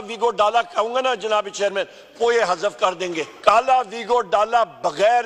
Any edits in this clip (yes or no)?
yes